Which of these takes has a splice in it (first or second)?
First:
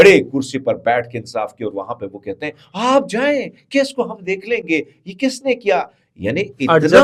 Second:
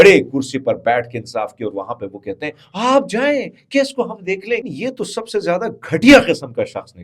second